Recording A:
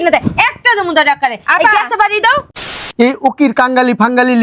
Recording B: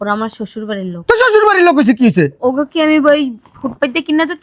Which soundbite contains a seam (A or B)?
A